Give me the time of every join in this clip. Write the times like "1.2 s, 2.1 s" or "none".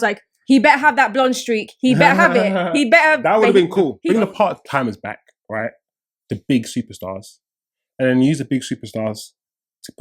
4.0 s